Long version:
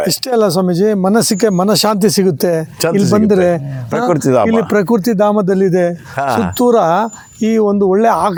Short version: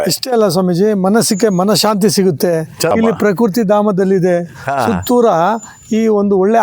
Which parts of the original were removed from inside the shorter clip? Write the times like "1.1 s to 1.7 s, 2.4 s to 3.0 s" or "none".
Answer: 2.9 s to 4.4 s